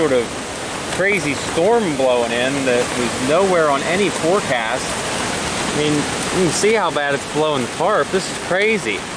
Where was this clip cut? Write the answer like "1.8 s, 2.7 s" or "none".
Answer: none